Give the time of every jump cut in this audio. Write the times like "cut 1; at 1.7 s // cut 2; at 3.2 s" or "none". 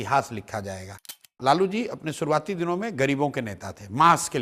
cut 1; at 1.1 s